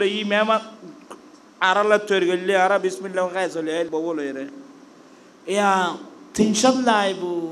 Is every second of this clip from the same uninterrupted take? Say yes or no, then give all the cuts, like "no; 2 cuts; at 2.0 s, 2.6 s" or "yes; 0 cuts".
no; 1 cut; at 3.9 s